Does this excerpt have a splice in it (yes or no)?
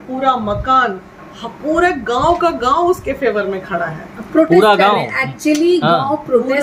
no